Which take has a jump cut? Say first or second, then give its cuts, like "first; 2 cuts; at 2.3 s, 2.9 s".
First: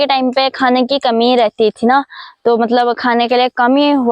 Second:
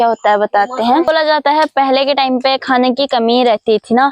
second; 1 cut; at 1.0 s